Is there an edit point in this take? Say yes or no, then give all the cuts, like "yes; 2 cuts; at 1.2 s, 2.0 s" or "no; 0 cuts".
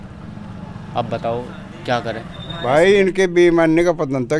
yes; 1 cut; at 2.4 s